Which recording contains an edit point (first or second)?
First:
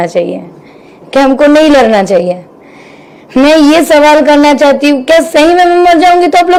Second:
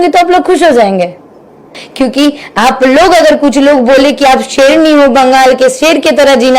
second